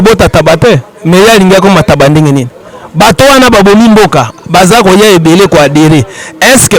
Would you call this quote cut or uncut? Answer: uncut